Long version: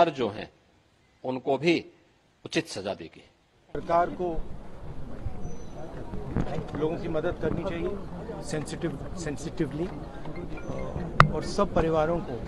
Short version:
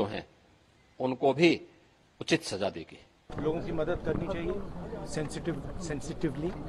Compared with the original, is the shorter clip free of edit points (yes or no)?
no